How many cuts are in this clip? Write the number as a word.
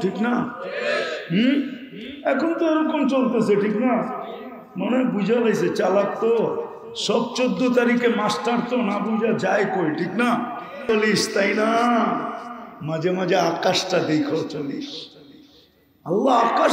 one